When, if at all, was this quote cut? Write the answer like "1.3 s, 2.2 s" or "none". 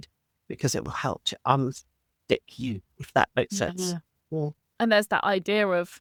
none